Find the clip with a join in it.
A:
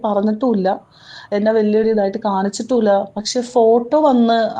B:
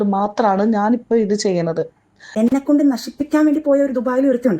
B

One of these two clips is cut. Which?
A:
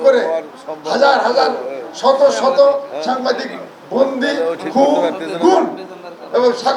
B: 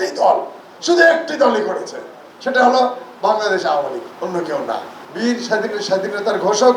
B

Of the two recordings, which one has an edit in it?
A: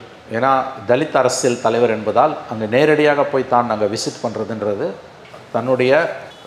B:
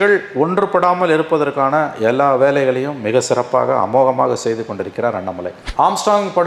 B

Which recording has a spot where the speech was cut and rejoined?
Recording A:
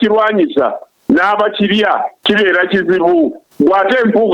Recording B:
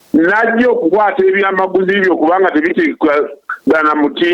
A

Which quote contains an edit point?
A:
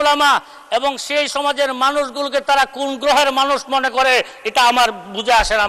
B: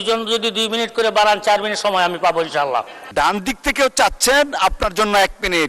B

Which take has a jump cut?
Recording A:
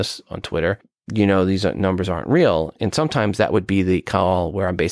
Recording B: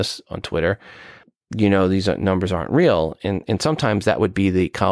A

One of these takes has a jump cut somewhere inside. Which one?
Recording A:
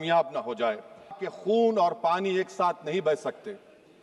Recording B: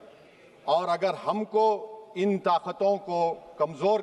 A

